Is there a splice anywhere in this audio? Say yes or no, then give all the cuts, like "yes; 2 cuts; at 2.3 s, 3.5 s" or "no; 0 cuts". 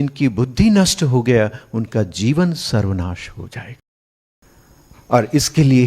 yes; 1 cut; at 4.3 s